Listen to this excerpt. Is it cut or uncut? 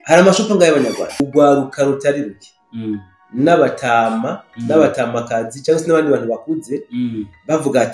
cut